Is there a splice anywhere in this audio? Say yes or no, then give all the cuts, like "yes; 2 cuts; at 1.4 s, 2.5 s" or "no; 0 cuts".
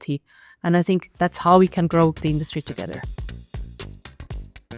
yes; 1 cut; at 3.0 s